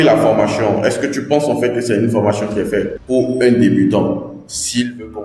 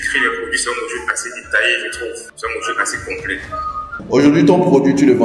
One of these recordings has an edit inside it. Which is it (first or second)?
second